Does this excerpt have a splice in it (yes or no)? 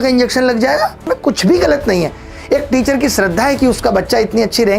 yes